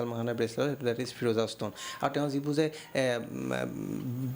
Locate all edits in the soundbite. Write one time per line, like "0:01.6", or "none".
none